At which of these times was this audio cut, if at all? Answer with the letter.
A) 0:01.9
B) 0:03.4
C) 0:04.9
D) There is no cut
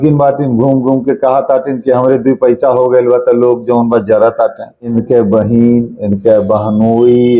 C